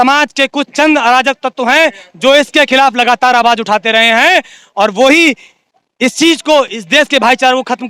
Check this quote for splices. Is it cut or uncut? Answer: uncut